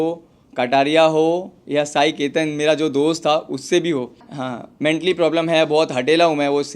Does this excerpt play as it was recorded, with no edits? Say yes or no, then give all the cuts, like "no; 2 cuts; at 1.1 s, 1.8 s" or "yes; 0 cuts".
no; 1 cut; at 4.2 s